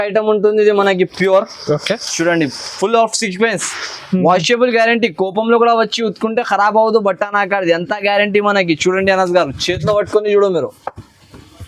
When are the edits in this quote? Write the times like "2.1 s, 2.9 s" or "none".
none